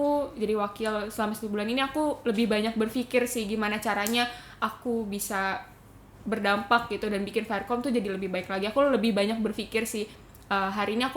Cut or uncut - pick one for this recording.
uncut